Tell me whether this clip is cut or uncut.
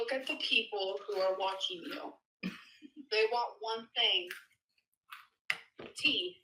uncut